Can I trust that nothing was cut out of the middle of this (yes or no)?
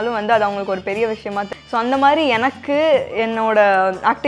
no